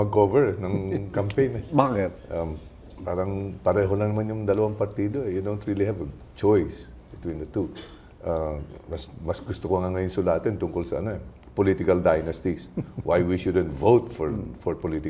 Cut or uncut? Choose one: uncut